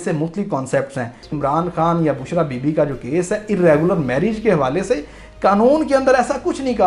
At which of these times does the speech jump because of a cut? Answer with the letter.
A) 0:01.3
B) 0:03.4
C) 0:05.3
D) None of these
A